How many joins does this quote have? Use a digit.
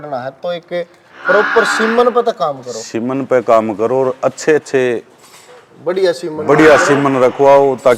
0